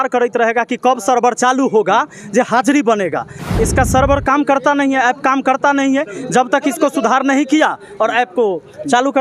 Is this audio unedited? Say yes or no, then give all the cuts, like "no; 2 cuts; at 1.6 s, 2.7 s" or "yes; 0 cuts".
no; 1 cut; at 3.4 s